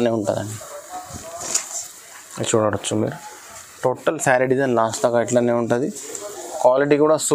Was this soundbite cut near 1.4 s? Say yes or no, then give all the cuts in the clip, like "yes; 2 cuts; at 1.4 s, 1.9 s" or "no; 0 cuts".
no; 0 cuts